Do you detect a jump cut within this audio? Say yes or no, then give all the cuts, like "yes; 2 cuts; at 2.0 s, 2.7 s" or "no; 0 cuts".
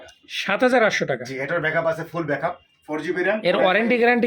yes; 1 cut; at 2.7 s